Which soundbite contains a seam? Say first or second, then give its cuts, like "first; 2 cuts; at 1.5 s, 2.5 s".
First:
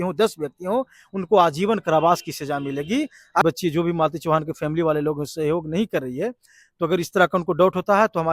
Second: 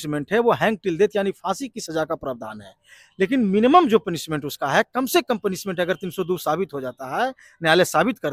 first; 1 cut; at 3.4 s